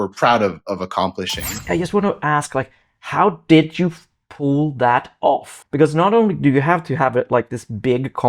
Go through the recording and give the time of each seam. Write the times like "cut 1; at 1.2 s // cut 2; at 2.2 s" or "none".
cut 1; at 1.5 s // cut 2; at 5.6 s